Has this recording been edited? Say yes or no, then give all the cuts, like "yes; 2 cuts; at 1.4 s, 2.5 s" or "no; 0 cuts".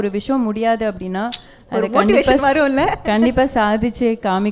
no; 0 cuts